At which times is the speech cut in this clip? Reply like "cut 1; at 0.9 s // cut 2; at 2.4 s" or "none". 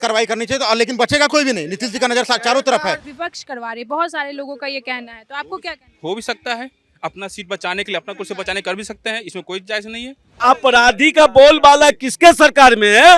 cut 1; at 3.1 s // cut 2; at 10.4 s